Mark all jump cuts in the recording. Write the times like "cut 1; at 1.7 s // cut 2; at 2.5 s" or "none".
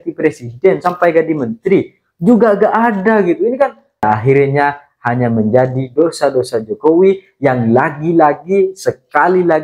cut 1; at 4.0 s